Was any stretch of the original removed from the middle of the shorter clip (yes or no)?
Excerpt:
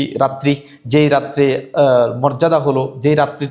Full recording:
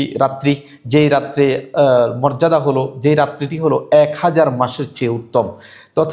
no